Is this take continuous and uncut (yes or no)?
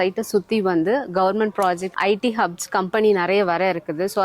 no